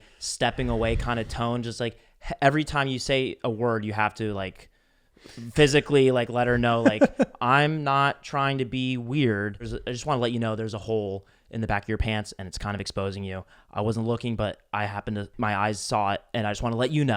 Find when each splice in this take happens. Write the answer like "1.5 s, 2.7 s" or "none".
9.7 s, 15.3 s

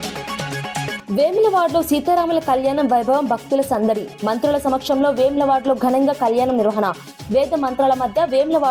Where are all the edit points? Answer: 0.9 s

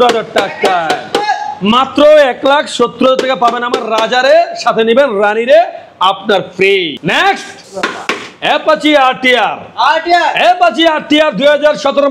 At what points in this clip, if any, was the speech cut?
none

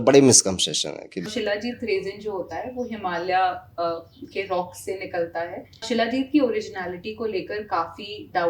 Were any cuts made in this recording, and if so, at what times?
1.3 s, 5.8 s

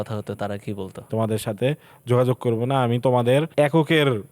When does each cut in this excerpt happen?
1.1 s, 3.5 s

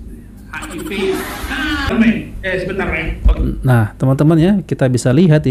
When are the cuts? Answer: 1.9 s

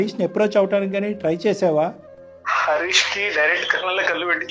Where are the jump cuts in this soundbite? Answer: none

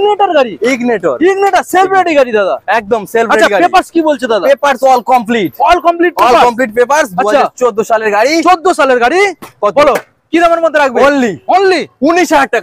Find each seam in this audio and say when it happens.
none

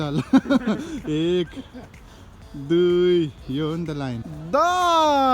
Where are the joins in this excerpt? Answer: 4.3 s

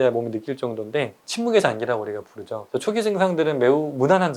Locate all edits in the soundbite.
1.2 s, 2.6 s

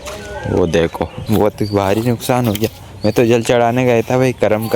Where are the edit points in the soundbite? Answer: 1.2 s

